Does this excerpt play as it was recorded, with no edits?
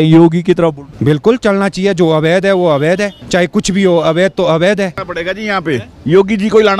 no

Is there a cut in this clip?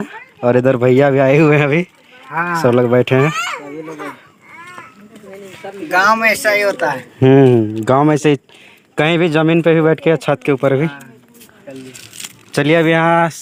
no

